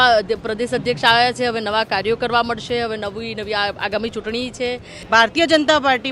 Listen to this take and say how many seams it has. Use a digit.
1